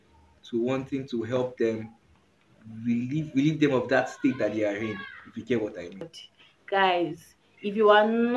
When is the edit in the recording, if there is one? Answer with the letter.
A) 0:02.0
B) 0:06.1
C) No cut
B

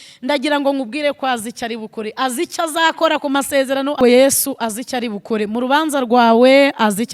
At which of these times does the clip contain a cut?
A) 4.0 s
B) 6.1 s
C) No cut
A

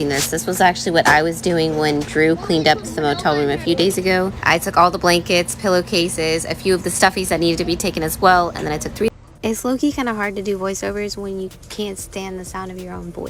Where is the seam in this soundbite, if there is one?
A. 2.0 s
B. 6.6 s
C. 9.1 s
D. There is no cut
C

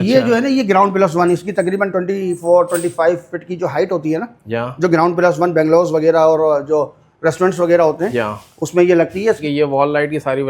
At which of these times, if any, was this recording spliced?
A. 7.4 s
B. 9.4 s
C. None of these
B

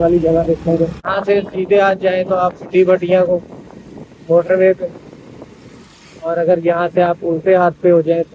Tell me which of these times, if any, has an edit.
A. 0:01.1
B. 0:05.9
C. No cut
A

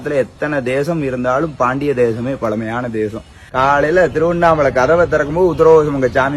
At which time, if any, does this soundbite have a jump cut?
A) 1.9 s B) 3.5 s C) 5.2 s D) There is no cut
B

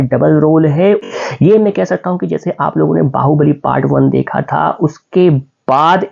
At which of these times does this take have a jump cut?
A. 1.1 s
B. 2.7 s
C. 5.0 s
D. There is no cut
A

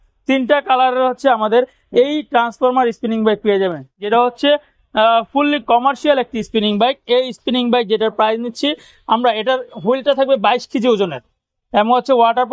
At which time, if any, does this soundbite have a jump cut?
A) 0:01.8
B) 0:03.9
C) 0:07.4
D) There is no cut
B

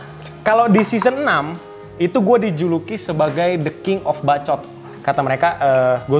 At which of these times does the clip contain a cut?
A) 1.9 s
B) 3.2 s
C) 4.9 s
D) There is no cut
D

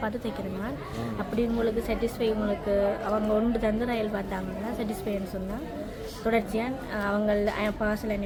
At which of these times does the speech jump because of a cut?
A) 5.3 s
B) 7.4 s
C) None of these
C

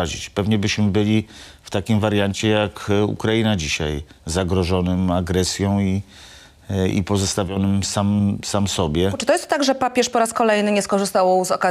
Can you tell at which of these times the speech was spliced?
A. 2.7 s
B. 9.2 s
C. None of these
B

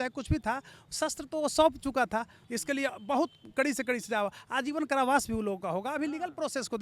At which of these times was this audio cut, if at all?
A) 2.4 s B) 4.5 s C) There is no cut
A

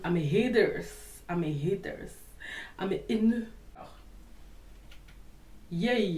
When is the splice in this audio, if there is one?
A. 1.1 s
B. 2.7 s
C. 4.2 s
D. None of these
C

